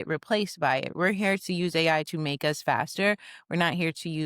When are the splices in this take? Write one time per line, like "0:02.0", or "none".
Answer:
0:00.9